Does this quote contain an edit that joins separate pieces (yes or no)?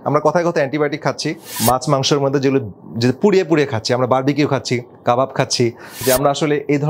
yes